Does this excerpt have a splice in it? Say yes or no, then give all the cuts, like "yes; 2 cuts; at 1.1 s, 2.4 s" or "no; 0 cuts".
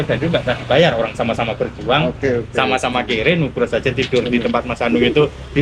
no; 0 cuts